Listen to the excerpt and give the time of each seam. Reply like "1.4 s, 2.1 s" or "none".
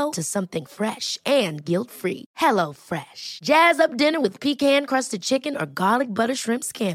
none